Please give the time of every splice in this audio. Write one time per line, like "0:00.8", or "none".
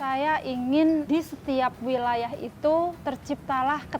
0:01.1
0:03.0